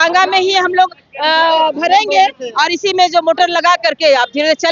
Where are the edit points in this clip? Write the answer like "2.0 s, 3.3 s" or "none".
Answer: none

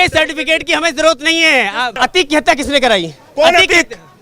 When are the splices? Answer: 1.9 s

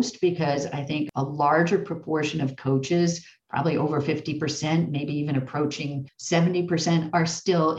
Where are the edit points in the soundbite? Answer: 1.1 s, 6.1 s

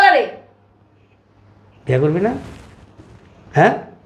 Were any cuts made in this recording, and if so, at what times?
none

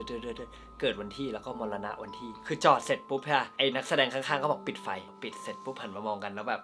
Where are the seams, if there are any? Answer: 2.4 s, 3.5 s, 5.2 s

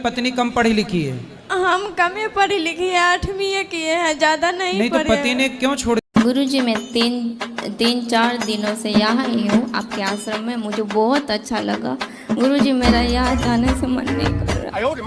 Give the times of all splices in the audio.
6.1 s

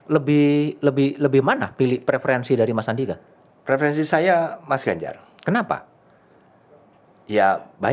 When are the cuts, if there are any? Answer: none

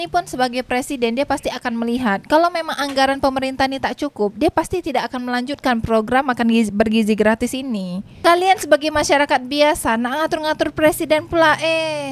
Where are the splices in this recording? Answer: none

